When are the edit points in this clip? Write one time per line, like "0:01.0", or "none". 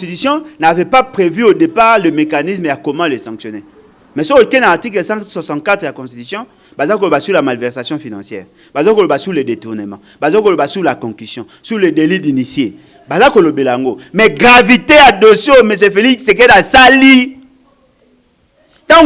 none